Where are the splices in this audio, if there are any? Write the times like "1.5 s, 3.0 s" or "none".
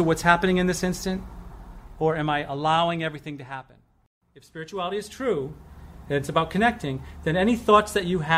4.2 s

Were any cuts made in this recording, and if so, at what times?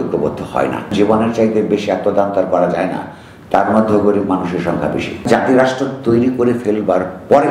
0.9 s, 5.3 s

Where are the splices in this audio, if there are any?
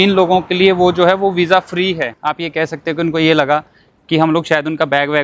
2.2 s

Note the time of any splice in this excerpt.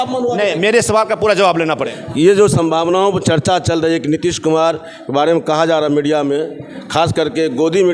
1.8 s

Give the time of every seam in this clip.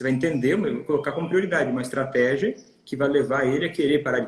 none

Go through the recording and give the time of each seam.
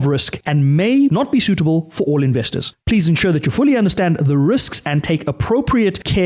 none

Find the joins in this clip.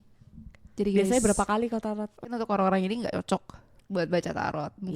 2.3 s

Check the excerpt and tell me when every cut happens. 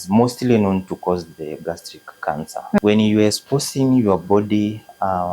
2.8 s

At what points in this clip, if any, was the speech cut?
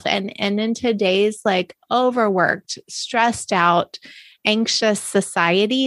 none

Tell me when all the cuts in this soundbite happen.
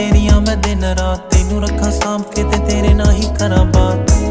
none

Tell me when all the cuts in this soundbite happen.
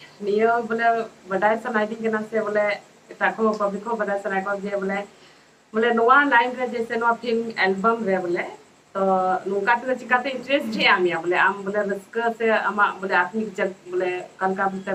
none

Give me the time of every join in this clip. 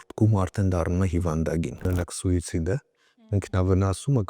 1.9 s

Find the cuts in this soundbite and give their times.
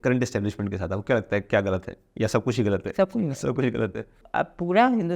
4.2 s

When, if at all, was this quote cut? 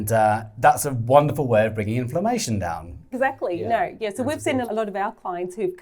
3.1 s, 4.7 s

